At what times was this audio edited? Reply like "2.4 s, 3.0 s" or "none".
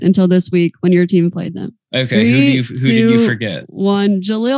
1.8 s